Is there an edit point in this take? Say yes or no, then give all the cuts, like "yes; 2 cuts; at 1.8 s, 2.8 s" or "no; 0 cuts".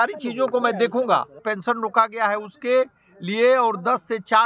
yes; 1 cut; at 1.4 s